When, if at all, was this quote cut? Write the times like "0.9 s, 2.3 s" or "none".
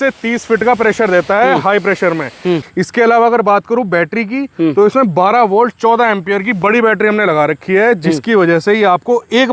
2.6 s